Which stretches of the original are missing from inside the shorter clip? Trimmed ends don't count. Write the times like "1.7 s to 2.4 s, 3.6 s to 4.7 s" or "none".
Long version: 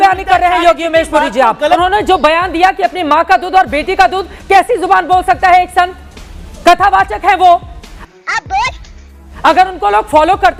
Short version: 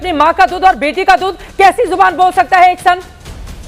none